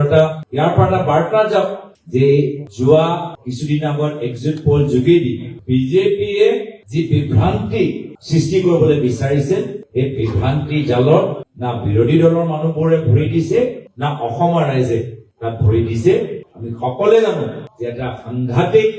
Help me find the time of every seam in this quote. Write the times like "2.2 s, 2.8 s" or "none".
13.8 s